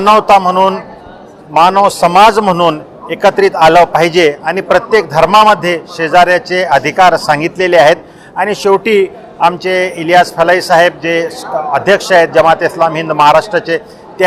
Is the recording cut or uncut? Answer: uncut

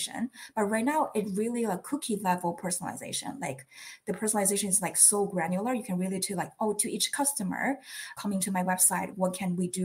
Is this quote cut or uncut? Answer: cut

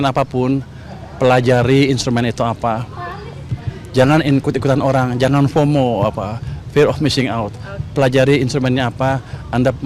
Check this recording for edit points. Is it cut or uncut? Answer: uncut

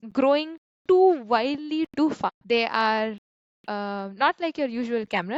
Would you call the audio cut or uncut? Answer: cut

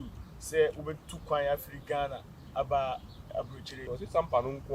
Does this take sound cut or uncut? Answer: cut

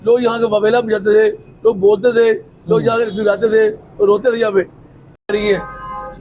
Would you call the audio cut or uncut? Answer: cut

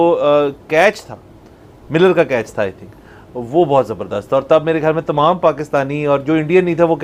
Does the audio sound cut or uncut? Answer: uncut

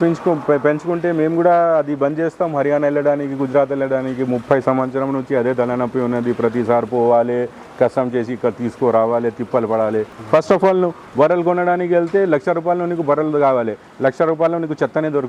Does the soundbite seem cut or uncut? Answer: cut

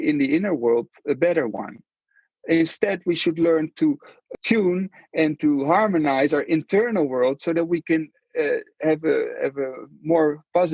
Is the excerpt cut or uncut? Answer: cut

